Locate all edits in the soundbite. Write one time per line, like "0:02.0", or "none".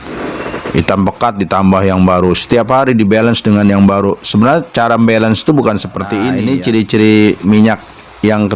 0:06.5